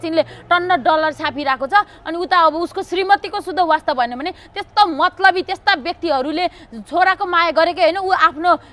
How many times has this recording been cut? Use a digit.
0